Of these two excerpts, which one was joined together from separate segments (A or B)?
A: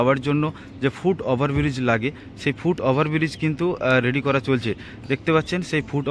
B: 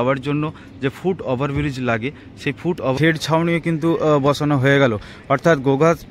B